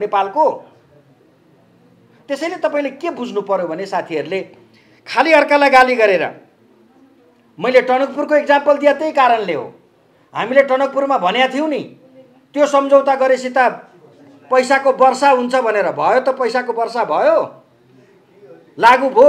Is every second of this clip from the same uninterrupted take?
yes; 0 cuts

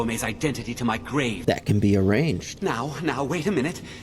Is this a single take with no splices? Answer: no; 2 cuts; at 1.4 s, 2.5 s

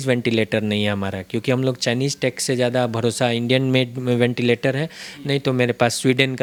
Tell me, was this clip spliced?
no; 0 cuts

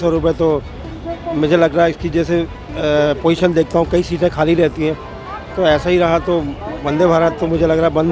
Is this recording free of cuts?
yes; 0 cuts

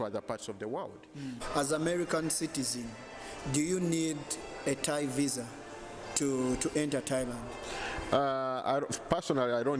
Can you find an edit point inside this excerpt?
yes; 1 cut; at 1.4 s

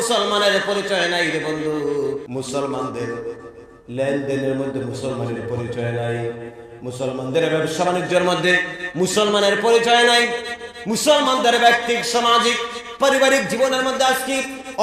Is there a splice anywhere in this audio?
yes; 1 cut; at 2.2 s

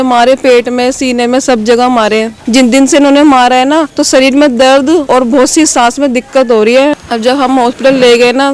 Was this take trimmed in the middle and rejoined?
yes; 4 cuts; at 2.3 s, 3.9 s, 5.0 s, 6.9 s

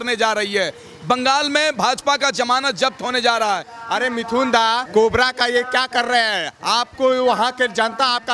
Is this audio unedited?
no; 2 cuts; at 3.7 s, 4.9 s

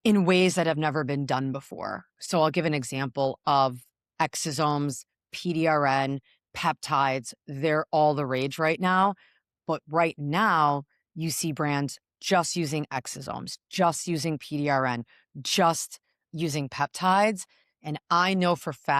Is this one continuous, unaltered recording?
yes; 0 cuts

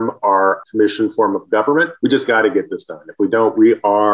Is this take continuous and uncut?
no; 1 cut; at 1.9 s

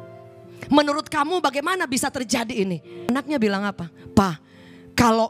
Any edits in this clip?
yes; 1 cut; at 3.1 s

